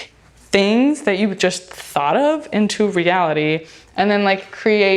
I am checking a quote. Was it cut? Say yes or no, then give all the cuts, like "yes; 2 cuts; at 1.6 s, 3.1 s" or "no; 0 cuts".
no; 0 cuts